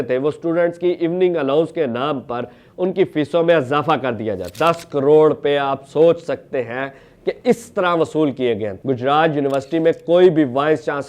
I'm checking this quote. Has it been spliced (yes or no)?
yes